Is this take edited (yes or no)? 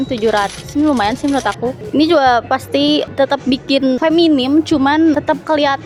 no